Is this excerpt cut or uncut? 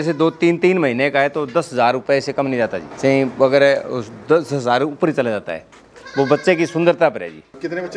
uncut